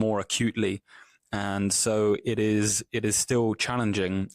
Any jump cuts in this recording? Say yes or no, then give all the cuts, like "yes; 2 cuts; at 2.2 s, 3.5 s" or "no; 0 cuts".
no; 0 cuts